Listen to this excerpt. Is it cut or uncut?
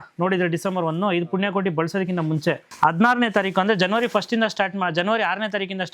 cut